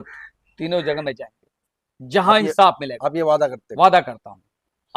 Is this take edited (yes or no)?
no